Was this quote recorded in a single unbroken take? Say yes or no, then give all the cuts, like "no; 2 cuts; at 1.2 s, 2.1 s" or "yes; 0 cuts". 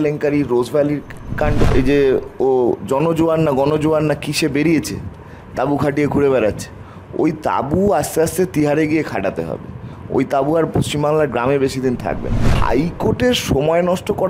no; 2 cuts; at 1.6 s, 12.5 s